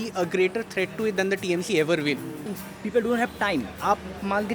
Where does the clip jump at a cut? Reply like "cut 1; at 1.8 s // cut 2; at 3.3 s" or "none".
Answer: cut 1; at 2.6 s